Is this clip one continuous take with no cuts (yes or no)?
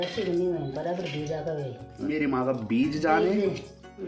no